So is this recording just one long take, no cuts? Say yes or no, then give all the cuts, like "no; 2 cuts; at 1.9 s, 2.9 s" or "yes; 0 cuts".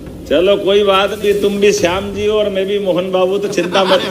no; 1 cut; at 1.2 s